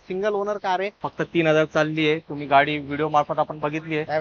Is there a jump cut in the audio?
yes; 1 cut; at 1.0 s

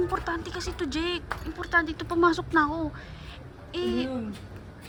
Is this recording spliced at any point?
no; 0 cuts

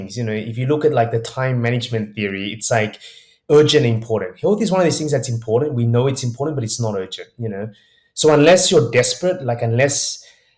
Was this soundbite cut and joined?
no; 0 cuts

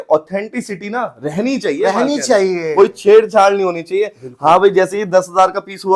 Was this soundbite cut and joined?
no; 0 cuts

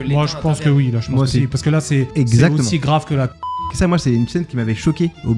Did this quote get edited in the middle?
yes; 2 cuts; at 2.1 s, 3.4 s

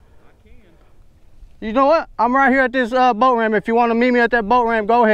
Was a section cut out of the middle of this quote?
no; 0 cuts

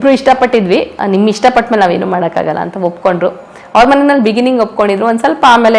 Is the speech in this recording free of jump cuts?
no; 1 cut; at 0.9 s

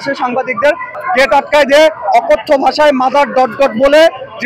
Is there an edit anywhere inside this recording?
yes; 1 cut; at 0.9 s

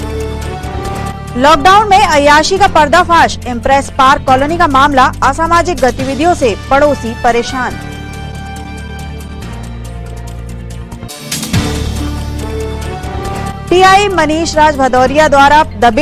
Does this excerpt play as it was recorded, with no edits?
yes; 0 cuts

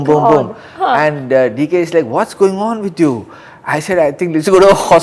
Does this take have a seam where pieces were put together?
no; 0 cuts

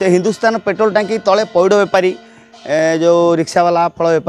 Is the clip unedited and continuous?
yes; 0 cuts

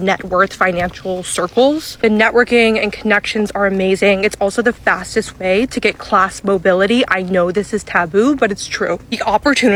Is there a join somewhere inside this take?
no; 0 cuts

